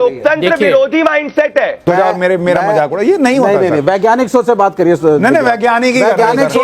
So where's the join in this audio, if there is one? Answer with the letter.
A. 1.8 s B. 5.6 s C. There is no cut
A